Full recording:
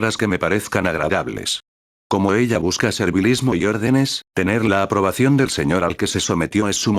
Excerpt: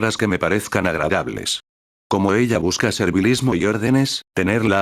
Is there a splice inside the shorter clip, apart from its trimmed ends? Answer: no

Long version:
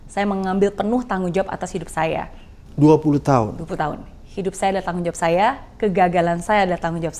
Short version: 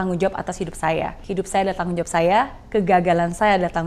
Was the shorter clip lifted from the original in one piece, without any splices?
no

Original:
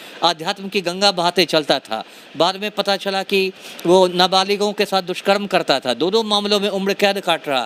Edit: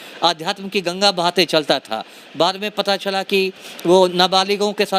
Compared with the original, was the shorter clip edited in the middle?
no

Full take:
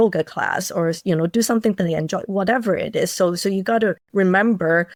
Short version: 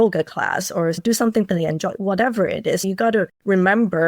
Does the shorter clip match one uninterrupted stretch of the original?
no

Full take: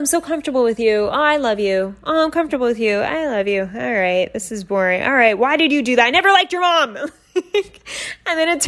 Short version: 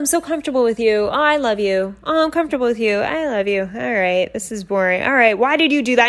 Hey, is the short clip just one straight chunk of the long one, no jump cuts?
yes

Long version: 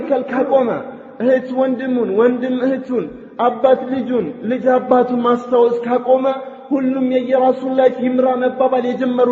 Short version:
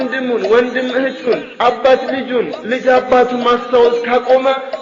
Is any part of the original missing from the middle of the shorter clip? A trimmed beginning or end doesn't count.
yes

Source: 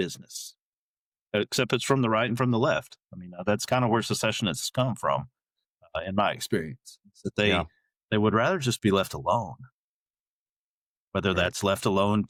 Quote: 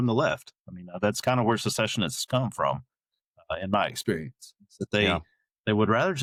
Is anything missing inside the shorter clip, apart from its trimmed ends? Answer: no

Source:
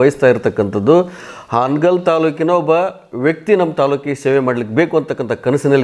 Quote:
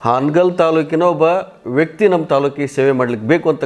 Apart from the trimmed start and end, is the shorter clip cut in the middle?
no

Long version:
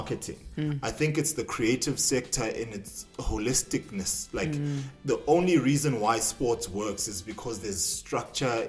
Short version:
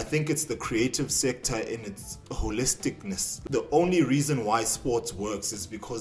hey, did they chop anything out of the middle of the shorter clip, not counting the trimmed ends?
yes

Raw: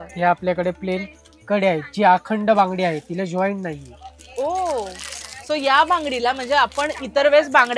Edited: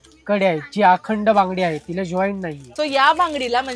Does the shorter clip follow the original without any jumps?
no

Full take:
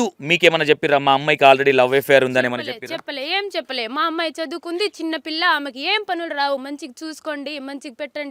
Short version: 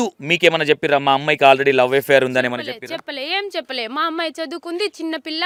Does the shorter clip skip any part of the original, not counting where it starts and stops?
no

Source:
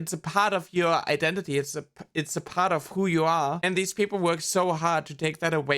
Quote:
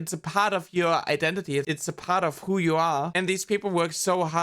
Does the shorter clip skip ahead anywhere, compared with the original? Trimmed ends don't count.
yes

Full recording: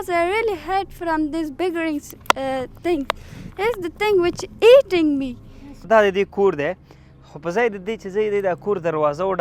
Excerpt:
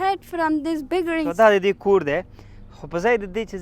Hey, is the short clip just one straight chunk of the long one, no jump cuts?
no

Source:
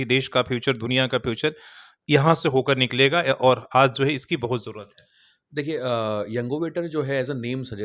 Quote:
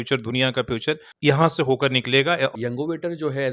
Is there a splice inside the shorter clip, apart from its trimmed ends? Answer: yes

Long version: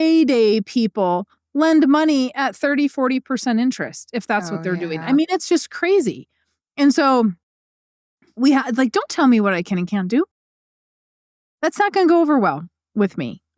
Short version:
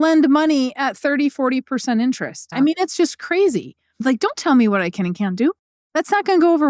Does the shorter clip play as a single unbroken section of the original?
no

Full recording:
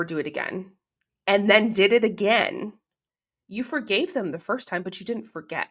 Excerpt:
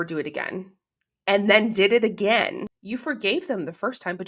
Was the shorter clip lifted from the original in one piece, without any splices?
no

